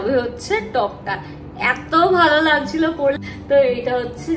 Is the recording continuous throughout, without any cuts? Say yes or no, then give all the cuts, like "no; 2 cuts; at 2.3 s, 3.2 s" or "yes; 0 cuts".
no; 1 cut; at 3.2 s